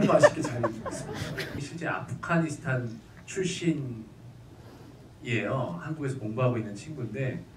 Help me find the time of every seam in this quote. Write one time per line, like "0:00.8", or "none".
0:01.6